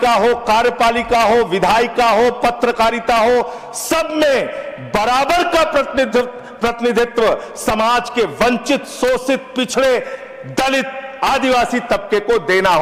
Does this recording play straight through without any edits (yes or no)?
yes